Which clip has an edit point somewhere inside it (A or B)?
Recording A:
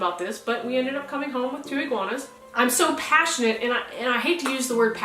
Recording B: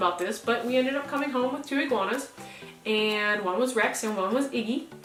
A